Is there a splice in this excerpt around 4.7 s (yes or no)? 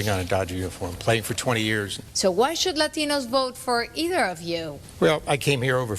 yes